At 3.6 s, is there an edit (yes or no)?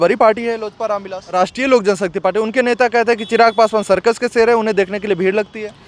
no